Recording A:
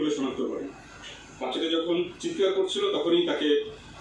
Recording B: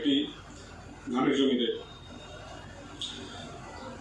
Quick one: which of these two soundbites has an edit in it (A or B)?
A